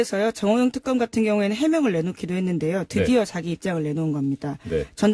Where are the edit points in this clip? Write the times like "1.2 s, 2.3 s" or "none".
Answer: none